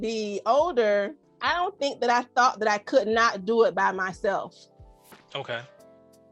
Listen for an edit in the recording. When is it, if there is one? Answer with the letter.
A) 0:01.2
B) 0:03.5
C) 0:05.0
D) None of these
A